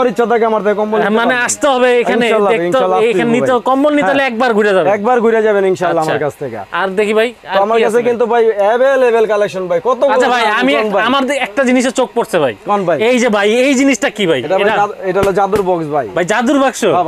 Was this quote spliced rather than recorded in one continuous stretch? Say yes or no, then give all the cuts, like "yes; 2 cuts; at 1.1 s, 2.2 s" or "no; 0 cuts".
no; 0 cuts